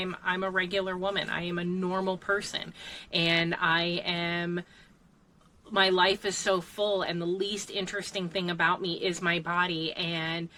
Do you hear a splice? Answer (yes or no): no